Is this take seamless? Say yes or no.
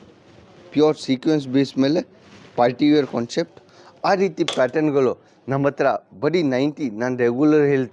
yes